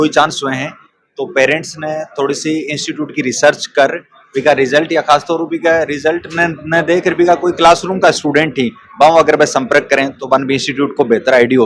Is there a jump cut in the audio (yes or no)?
no